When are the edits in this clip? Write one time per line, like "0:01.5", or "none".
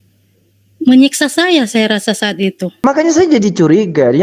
0:02.7